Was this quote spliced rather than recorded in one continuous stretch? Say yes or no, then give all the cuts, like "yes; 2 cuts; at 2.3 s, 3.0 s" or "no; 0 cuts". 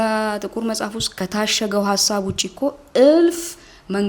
yes; 1 cut; at 1.0 s